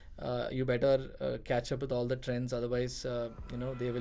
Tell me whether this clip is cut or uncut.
uncut